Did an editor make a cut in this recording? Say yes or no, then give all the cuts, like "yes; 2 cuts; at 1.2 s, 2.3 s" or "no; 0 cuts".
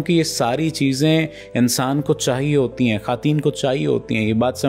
no; 0 cuts